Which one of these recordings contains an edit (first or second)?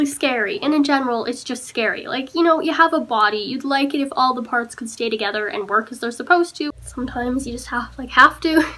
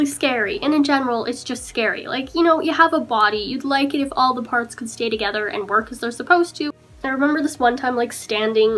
first